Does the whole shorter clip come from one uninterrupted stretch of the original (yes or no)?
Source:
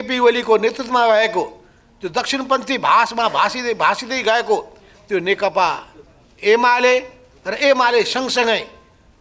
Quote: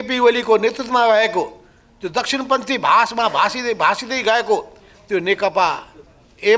yes